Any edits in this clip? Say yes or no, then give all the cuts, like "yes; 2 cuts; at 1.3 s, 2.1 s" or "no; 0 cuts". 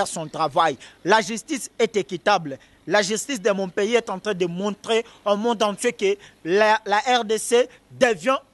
no; 0 cuts